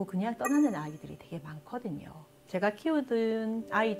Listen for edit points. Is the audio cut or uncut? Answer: cut